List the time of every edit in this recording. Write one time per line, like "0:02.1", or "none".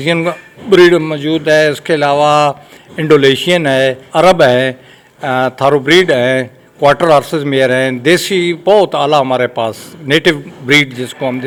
none